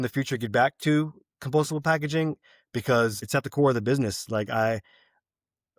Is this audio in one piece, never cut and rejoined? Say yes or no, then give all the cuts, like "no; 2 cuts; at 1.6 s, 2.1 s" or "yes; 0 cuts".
no; 1 cut; at 3.2 s